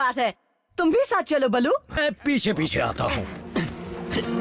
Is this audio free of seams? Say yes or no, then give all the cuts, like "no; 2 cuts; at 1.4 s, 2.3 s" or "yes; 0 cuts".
no; 1 cut; at 1.9 s